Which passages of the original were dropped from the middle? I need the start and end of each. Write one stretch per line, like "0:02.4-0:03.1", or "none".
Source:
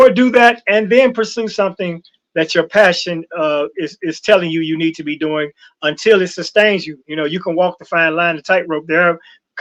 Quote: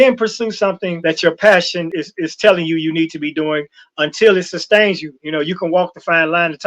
0:01.9-0:02.2
0:03.2-0:03.8